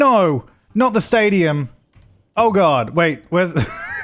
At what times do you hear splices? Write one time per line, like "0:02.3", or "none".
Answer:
none